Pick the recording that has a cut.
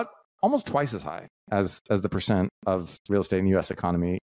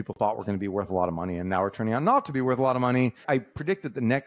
second; 1 cut; at 3.2 s

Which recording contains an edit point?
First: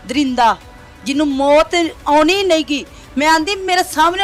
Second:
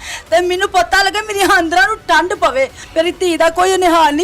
second; 1 cut; at 2.8 s

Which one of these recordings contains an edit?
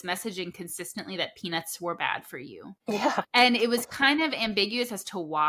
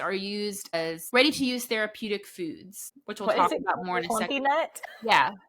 second; 1 cut; at 1.0 s

